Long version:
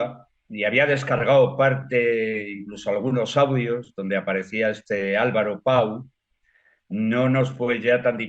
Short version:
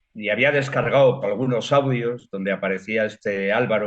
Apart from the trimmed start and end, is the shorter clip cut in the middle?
yes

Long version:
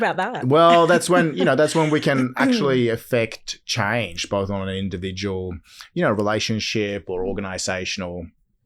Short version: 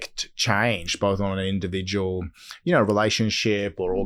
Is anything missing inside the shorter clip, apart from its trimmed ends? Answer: no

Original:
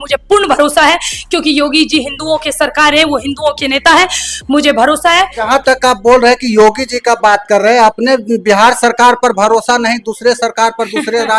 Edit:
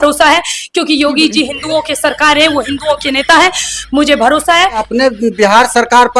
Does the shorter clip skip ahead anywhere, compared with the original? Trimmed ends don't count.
yes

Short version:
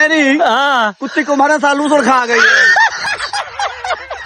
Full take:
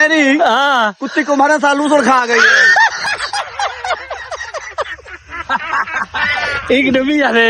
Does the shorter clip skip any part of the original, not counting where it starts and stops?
no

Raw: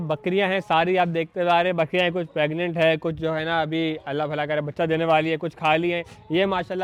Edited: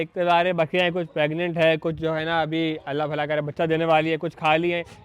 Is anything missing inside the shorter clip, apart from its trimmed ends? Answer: no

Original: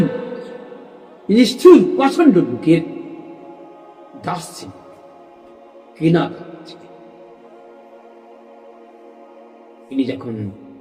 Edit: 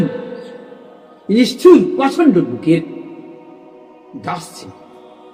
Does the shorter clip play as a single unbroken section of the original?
yes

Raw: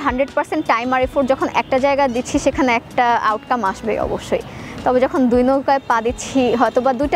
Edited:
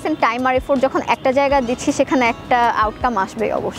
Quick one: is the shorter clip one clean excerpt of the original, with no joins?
yes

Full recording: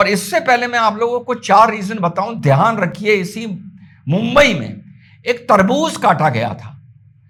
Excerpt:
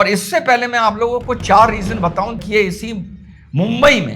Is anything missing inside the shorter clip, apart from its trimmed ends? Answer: yes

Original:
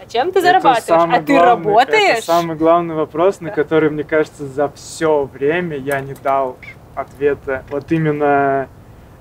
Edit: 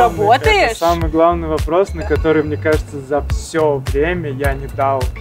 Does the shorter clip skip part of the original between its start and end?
no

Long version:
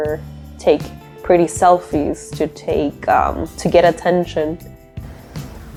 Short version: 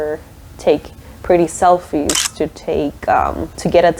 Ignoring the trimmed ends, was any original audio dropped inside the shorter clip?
no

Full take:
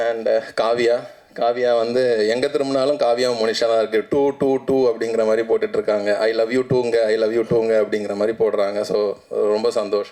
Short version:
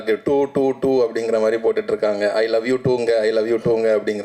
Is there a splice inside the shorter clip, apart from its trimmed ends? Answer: no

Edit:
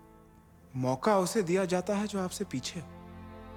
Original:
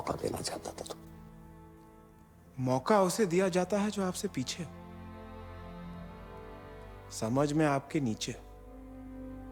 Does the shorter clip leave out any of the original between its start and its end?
no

